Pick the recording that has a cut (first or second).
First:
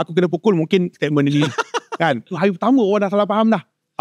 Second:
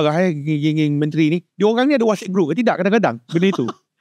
first